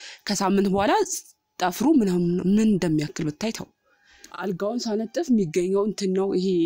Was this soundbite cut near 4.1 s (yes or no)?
yes